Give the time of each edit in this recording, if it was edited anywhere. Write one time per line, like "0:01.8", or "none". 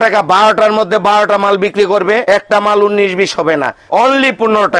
0:02.2
0:03.8